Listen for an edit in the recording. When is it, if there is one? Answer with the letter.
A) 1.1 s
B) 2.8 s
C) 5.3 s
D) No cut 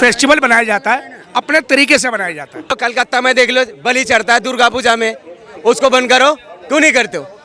B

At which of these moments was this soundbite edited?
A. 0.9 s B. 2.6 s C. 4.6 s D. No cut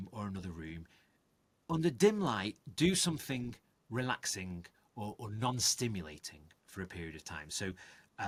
D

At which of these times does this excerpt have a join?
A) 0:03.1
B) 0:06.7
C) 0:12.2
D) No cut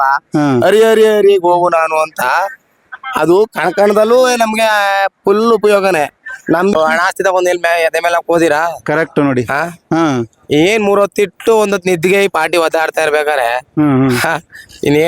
B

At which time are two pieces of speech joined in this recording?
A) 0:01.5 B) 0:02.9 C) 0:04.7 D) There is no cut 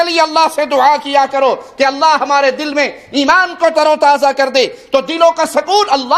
D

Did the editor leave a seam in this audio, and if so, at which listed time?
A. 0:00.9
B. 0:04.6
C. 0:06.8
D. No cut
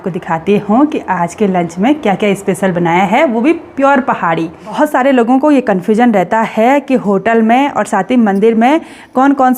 B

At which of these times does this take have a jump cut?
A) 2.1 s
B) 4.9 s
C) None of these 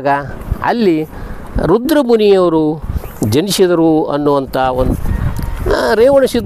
B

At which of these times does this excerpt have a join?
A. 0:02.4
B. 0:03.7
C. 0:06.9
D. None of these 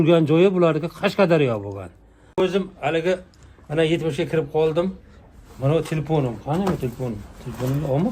A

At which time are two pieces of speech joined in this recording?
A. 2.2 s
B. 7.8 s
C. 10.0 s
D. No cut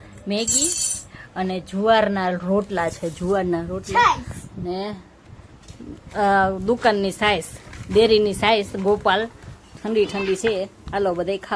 D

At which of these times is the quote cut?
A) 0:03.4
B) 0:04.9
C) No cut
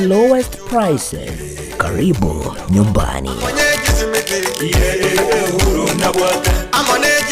A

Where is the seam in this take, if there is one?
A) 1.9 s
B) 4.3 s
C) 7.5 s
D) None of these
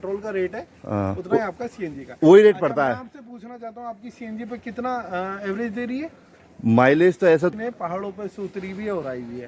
C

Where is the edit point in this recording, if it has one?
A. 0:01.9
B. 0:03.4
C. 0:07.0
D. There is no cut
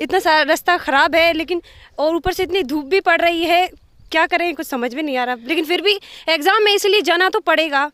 D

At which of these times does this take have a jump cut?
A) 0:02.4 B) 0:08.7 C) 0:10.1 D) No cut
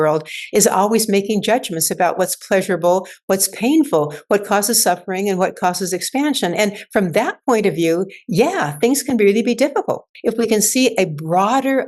C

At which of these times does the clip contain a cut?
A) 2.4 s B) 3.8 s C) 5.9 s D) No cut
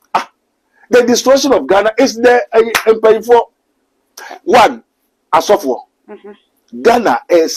D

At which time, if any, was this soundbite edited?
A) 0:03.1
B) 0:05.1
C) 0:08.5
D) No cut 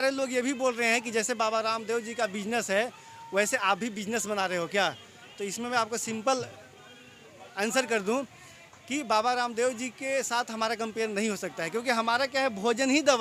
D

